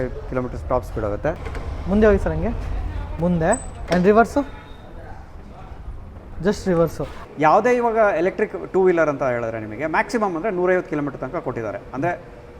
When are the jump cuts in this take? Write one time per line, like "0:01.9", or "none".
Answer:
0:01.5
0:07.1

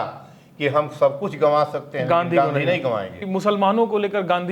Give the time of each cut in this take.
0:03.1

